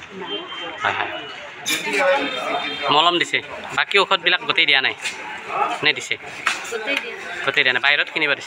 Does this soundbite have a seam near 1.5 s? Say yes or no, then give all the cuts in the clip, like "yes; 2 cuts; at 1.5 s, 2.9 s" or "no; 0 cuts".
yes; 1 cut; at 1.5 s